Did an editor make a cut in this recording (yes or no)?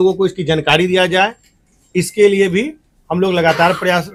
no